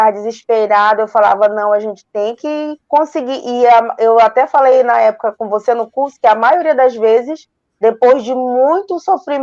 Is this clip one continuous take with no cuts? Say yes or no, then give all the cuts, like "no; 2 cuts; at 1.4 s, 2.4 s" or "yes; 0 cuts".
yes; 0 cuts